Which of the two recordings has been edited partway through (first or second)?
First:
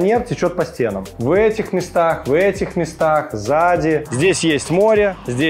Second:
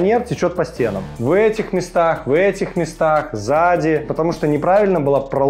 first